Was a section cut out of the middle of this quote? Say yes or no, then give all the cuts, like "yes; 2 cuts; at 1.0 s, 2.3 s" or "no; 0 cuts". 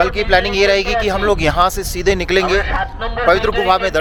no; 0 cuts